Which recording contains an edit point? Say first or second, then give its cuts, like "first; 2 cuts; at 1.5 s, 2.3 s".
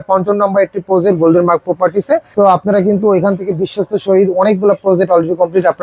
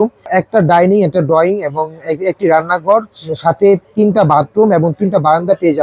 first; 1 cut; at 2.3 s